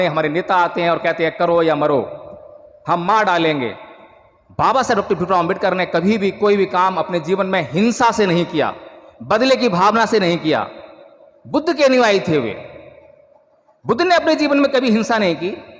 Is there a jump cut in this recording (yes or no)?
no